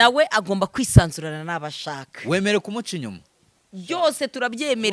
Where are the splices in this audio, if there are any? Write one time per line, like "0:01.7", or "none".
none

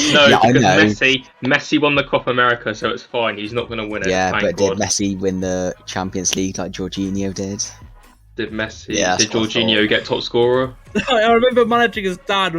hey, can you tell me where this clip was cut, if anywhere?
0:10.8

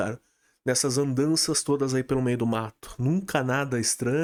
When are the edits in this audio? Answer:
none

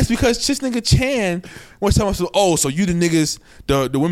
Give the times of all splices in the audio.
none

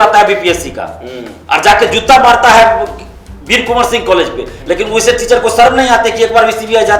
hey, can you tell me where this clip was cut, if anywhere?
none

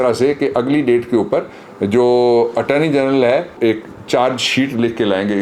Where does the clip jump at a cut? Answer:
0:03.6

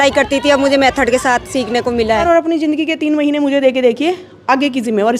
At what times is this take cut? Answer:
0:02.2

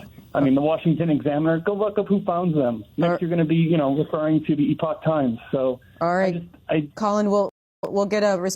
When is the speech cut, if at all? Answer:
0:07.6

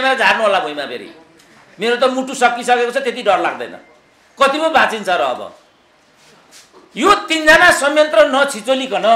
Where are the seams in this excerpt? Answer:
none

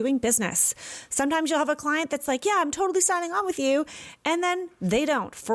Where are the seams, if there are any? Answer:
none

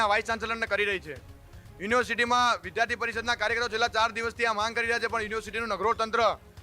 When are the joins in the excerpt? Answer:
none

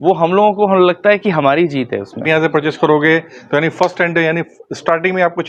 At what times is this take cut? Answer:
0:02.2

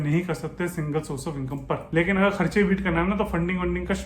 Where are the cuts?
0:01.9

